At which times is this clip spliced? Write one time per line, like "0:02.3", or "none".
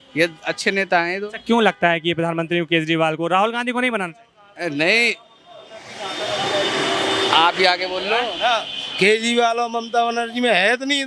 none